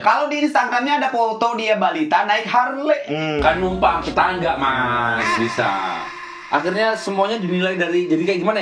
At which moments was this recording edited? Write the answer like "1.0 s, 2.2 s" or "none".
6.0 s